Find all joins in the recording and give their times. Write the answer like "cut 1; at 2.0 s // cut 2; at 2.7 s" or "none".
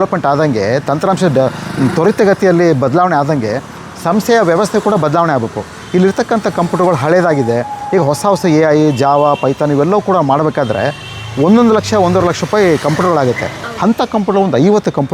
none